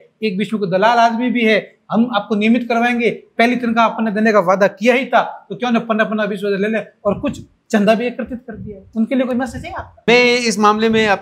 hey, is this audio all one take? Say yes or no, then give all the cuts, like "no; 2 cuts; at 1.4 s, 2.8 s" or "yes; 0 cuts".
no; 1 cut; at 10.0 s